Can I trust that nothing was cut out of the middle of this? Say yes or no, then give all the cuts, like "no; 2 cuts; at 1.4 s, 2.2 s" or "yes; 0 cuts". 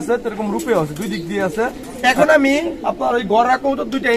no; 1 cut; at 1.9 s